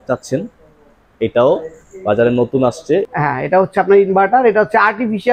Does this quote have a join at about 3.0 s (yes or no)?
yes